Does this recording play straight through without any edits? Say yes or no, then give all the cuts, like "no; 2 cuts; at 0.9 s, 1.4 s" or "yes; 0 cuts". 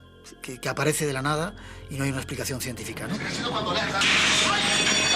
no; 1 cut; at 3.2 s